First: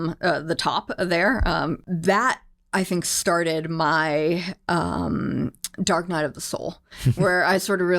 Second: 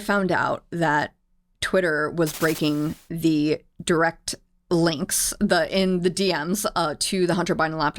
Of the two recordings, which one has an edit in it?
first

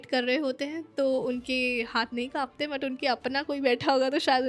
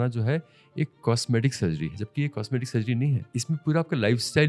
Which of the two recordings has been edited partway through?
second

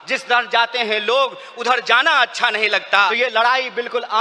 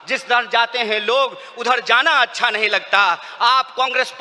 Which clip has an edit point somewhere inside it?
first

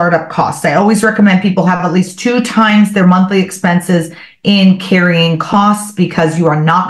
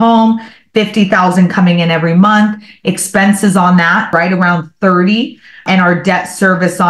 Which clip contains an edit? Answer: second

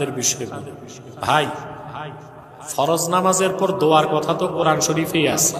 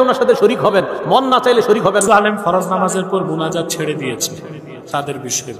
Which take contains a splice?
second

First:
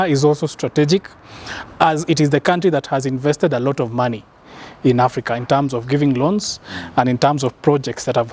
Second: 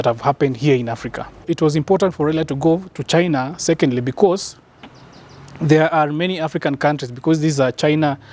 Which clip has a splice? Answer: second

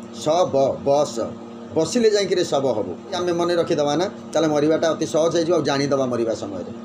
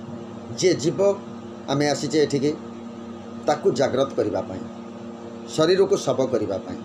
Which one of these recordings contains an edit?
first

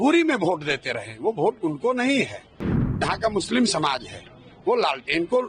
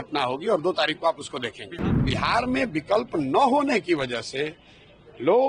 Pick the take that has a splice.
second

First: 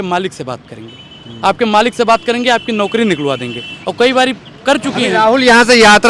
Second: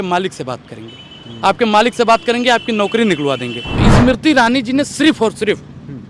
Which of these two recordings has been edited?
second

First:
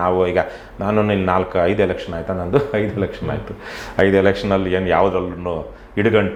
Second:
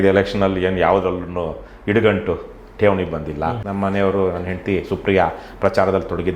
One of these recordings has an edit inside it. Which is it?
second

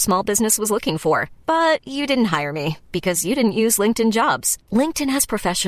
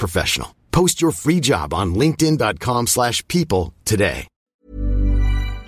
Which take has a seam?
second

